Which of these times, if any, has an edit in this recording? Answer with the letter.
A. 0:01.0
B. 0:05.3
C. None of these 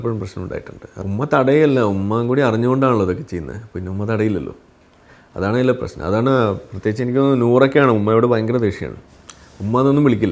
A